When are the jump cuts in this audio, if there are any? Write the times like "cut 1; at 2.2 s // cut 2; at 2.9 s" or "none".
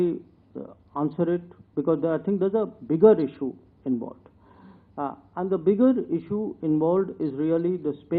none

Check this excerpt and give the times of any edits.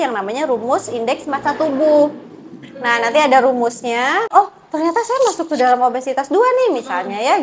cut 1; at 4.3 s

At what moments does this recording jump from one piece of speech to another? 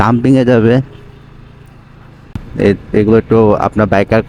cut 1; at 2.4 s

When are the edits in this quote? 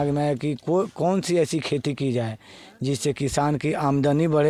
none

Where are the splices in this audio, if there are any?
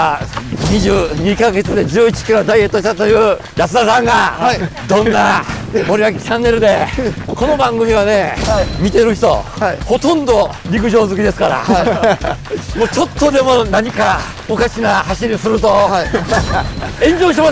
cut 1; at 3.5 s // cut 2; at 4.7 s // cut 3; at 5.6 s // cut 4; at 7.2 s // cut 5; at 8.7 s // cut 6; at 9.8 s // cut 7; at 10.6 s // cut 8; at 14.3 s

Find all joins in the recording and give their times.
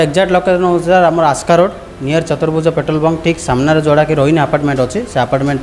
none

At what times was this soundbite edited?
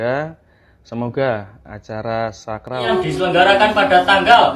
cut 1; at 2.9 s

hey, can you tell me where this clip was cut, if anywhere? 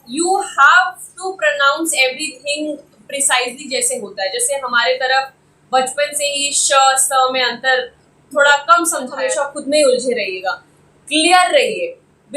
cut 1; at 9.2 s

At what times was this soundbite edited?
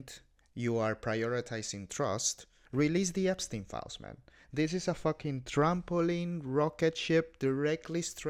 none

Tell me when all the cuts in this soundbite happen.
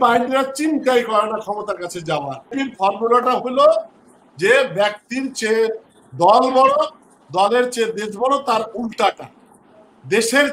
cut 1; at 2.5 s

